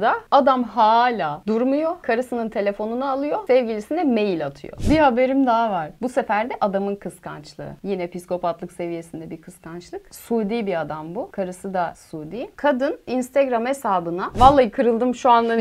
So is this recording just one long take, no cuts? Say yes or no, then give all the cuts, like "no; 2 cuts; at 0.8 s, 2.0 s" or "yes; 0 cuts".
no; 2 cuts; at 4.7 s, 14.3 s